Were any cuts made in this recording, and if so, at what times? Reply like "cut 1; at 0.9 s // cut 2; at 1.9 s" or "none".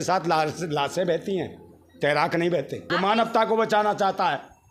cut 1; at 2.9 s